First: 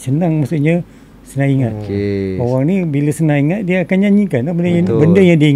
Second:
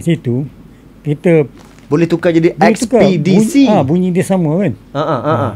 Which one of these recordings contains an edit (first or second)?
first